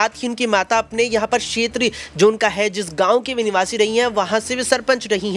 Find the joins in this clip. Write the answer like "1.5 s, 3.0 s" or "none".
none